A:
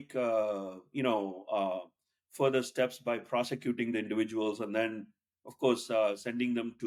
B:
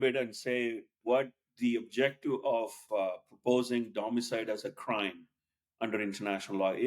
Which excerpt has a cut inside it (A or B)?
B